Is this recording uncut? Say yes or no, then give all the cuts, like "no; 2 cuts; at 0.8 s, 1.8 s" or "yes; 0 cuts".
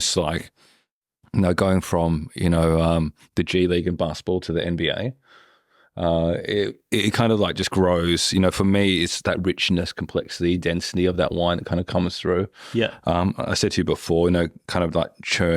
yes; 0 cuts